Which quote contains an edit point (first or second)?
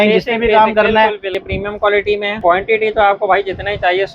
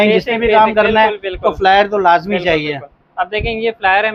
first